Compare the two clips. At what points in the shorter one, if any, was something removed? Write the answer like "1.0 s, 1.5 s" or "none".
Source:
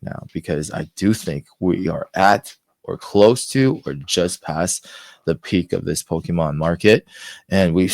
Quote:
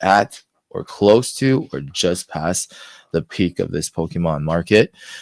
none